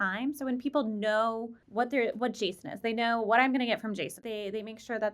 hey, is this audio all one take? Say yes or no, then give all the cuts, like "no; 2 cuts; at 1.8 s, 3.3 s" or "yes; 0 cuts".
no; 2 cuts; at 1.6 s, 4.2 s